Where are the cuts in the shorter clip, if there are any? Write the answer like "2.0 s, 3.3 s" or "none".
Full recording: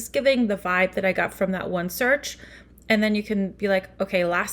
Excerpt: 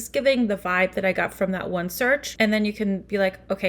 2.3 s